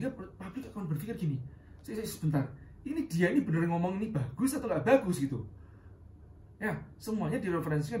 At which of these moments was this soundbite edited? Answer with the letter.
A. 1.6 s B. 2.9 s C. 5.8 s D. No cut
D